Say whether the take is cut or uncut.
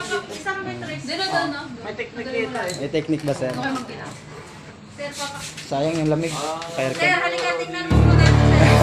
cut